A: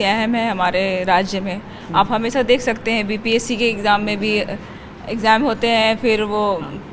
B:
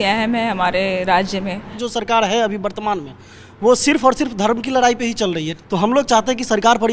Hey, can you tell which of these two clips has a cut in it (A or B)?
B